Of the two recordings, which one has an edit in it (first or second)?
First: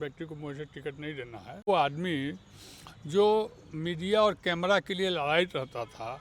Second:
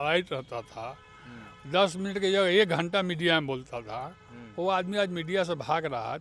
first